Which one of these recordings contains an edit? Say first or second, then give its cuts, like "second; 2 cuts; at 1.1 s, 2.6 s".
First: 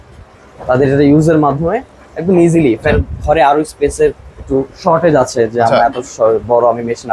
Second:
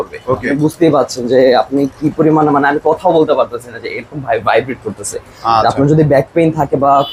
first; 1 cut; at 2.9 s